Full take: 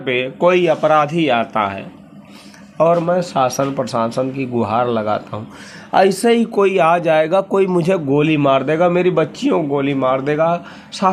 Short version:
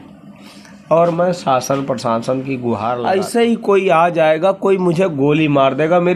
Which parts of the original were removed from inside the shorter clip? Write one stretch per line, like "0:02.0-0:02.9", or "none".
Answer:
0:05.0-0:06.0